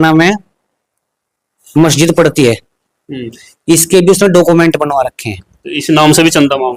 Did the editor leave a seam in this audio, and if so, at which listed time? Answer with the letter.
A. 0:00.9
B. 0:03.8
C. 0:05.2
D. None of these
D